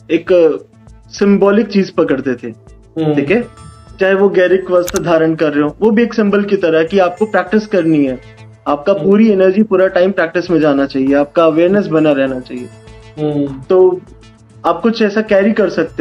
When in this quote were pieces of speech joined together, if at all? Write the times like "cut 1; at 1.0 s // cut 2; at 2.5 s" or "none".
none